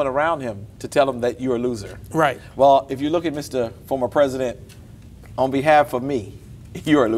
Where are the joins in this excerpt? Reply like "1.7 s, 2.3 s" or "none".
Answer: none